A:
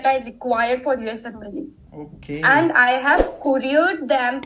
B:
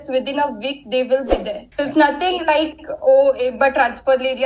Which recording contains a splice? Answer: B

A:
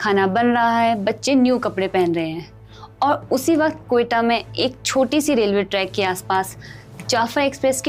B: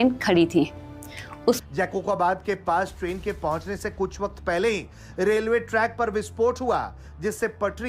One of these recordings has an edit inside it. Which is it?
B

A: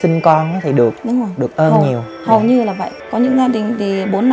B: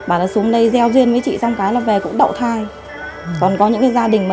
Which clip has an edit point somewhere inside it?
A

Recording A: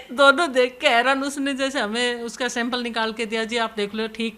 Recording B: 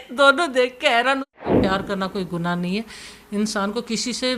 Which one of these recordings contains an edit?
B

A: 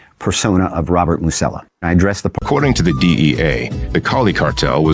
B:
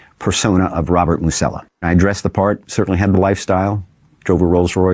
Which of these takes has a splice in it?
A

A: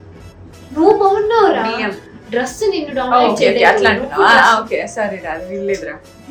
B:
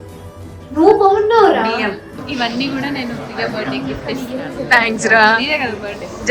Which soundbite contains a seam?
B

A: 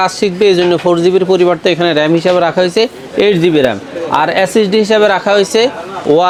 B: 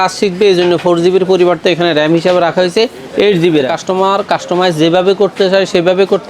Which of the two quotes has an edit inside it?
B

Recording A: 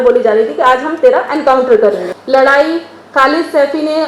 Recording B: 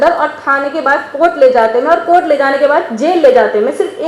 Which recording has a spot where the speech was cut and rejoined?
A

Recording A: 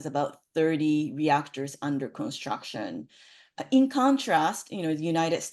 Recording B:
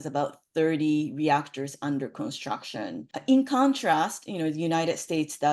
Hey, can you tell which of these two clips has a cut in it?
B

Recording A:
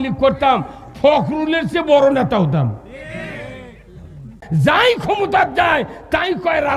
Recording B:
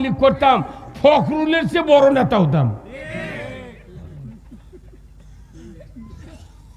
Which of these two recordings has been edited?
A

